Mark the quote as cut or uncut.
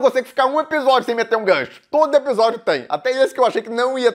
uncut